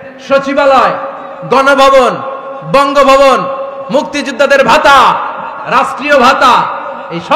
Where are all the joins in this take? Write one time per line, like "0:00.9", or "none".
none